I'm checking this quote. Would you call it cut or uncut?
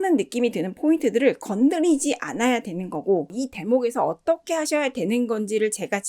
cut